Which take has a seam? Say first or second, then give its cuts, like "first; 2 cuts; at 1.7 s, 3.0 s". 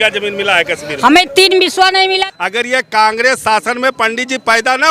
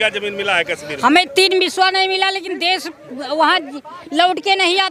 first; 1 cut; at 2.3 s